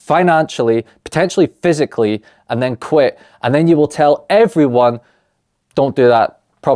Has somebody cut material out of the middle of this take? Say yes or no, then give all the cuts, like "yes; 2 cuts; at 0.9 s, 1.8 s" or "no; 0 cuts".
no; 0 cuts